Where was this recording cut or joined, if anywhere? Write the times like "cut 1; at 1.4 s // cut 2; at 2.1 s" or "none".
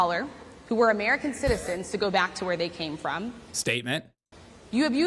none